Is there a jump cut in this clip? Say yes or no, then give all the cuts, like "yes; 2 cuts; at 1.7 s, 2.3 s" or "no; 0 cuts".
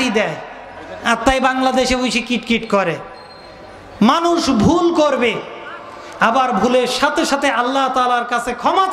no; 0 cuts